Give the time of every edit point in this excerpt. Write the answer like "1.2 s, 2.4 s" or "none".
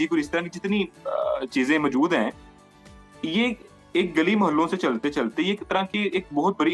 none